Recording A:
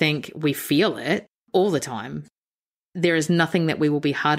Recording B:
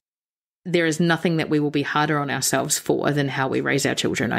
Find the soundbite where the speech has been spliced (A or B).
A